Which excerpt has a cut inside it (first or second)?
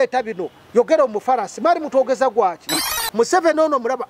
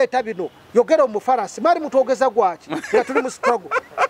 first